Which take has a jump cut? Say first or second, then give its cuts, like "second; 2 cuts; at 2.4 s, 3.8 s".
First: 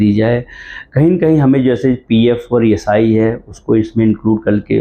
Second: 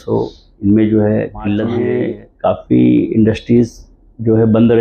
second; 1 cut; at 1.8 s